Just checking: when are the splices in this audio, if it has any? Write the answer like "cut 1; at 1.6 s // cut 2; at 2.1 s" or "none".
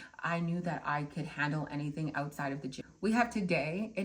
cut 1; at 2.7 s